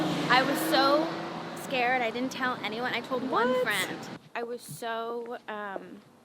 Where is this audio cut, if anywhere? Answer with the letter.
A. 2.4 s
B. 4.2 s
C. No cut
B